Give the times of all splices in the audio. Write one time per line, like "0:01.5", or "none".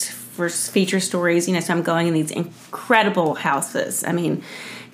none